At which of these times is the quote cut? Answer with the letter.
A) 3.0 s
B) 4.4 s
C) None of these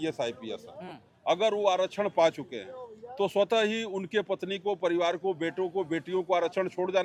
C